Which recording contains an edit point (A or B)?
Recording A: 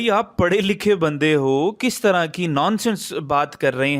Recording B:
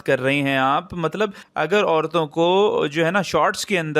B